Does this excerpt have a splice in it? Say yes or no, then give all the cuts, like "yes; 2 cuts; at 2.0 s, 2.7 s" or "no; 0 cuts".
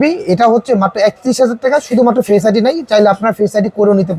no; 0 cuts